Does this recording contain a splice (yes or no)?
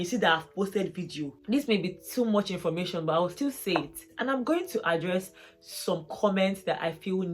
yes